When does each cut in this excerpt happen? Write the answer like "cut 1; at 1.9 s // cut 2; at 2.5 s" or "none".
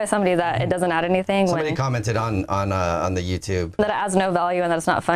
cut 1; at 3.8 s